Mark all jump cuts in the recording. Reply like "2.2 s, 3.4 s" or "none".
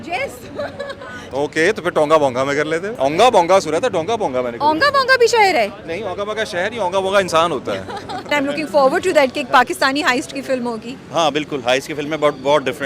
1.2 s, 2.9 s, 8.3 s